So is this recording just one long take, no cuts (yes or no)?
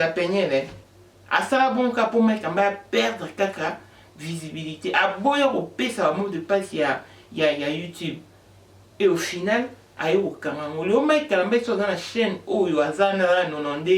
yes